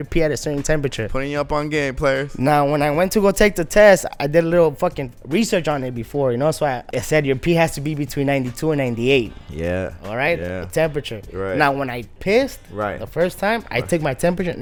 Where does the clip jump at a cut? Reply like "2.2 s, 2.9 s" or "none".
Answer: none